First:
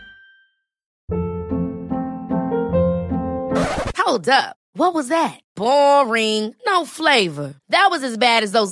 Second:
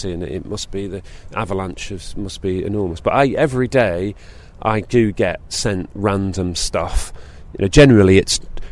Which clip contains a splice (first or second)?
first